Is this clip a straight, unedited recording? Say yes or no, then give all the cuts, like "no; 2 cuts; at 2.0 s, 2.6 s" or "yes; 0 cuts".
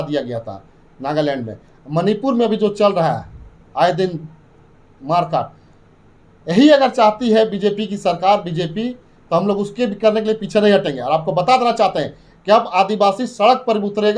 yes; 0 cuts